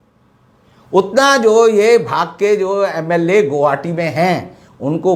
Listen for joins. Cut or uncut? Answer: uncut